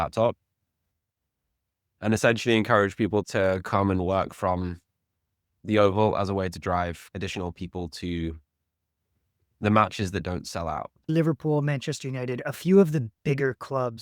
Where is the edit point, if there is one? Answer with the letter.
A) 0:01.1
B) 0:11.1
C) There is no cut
B